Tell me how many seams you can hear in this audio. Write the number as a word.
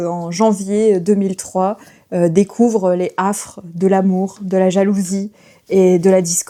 zero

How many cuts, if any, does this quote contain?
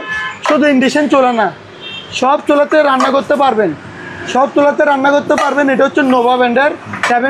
zero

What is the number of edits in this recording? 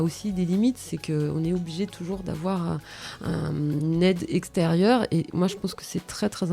zero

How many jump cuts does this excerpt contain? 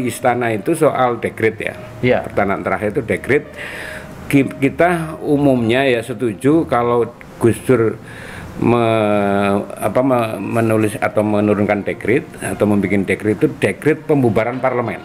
zero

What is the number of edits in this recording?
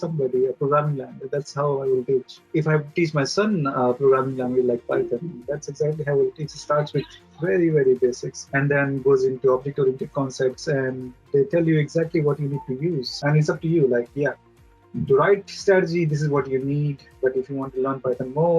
three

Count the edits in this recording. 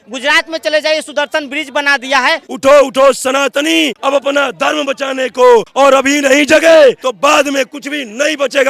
four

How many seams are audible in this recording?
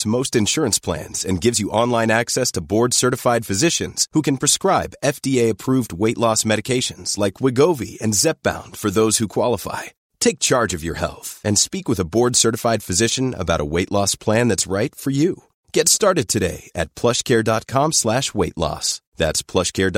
zero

